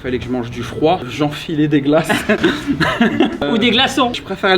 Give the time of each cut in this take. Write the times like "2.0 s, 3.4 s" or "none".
3.4 s